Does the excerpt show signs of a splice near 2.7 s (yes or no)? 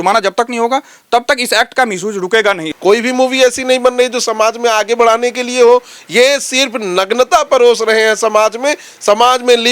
yes